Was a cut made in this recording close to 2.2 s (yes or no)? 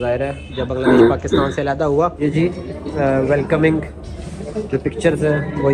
yes